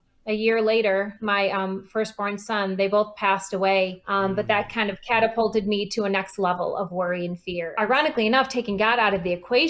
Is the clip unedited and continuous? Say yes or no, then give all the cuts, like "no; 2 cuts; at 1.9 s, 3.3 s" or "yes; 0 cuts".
no; 2 cuts; at 4.0 s, 7.6 s